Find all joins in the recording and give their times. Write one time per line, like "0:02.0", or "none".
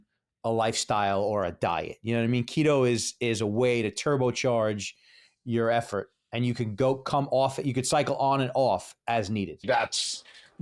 0:09.6